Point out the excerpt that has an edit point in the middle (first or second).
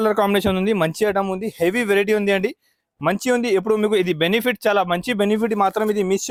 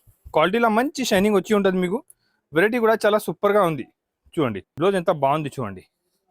second